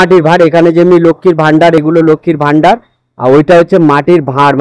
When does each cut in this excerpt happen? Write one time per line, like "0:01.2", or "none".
none

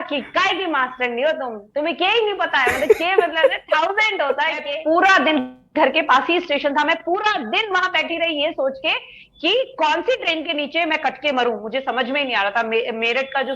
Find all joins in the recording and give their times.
0:04.7

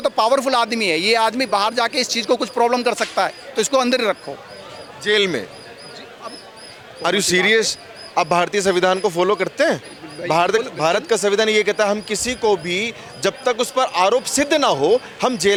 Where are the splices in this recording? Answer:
none

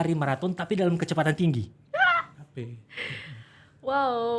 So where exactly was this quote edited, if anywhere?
none

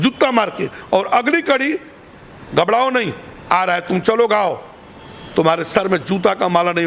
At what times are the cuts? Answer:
none

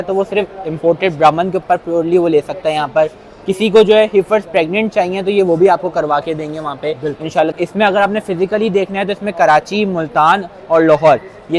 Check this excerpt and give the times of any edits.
0:07.5

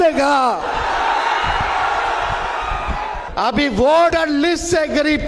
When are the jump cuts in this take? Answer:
0:03.2
0:04.1

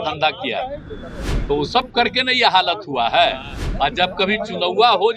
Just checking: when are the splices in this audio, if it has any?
none

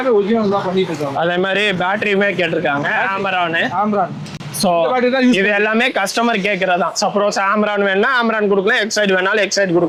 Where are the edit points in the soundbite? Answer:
none

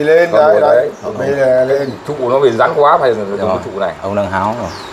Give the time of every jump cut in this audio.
none

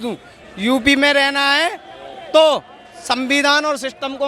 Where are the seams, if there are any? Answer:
none

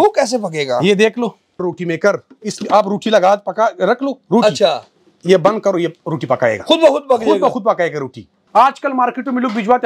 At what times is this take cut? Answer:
0:01.7
0:08.4

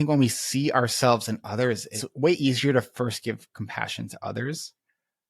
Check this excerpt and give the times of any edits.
0:02.0

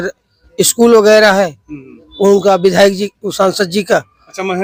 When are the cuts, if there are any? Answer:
none

